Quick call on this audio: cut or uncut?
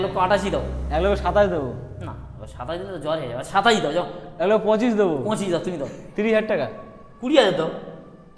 cut